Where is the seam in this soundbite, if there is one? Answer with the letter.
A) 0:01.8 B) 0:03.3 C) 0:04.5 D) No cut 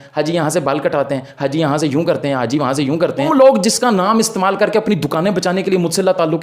B